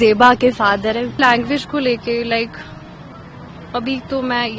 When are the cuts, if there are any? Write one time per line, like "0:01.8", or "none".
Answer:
0:01.2